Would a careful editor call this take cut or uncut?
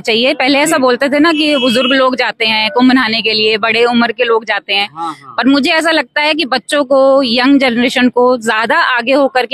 uncut